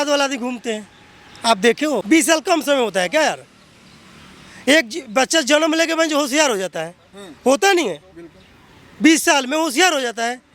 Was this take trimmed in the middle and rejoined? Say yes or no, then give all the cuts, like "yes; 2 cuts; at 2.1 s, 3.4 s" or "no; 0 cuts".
yes; 1 cut; at 2.0 s